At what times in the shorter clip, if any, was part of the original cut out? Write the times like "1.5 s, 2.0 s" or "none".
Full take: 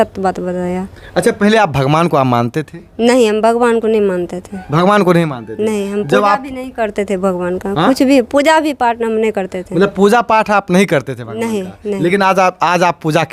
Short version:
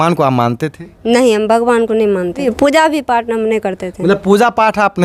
2.5 s